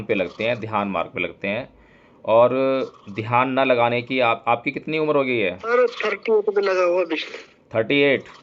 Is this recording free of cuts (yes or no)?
no